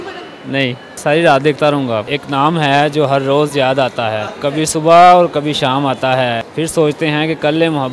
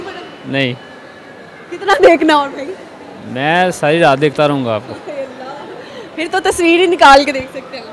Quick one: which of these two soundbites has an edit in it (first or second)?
first